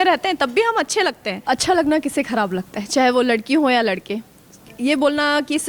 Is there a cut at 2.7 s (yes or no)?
no